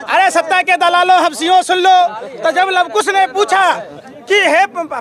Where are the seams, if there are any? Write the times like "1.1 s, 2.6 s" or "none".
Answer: none